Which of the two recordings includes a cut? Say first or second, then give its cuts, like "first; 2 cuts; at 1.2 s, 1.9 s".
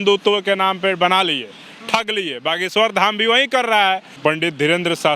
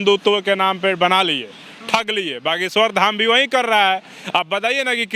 first; 1 cut; at 4.1 s